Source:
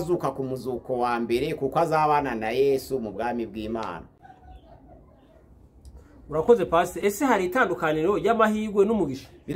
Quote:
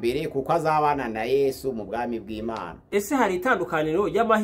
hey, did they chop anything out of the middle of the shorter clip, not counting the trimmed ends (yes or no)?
yes